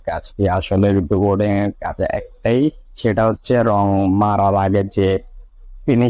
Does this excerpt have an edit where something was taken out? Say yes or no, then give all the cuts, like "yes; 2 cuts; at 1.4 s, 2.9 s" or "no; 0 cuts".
no; 0 cuts